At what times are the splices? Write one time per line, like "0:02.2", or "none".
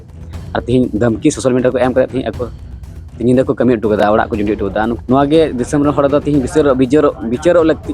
0:04.9